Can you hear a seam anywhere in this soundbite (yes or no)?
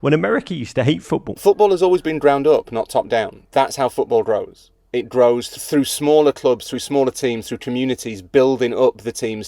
yes